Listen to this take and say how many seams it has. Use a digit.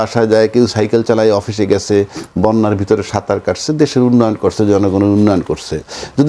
0